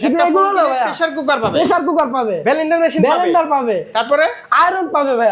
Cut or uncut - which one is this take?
uncut